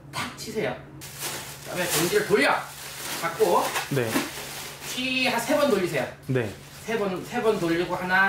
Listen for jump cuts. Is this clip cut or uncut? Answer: cut